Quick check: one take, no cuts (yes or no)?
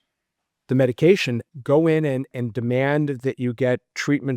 no